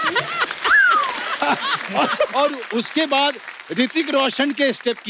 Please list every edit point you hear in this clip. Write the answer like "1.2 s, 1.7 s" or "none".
1.4 s